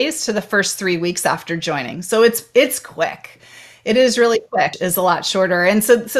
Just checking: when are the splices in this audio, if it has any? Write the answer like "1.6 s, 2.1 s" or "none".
4.7 s